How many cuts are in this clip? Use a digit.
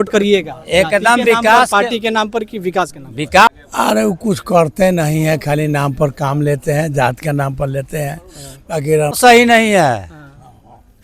2